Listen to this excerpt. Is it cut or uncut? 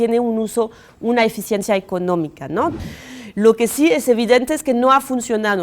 cut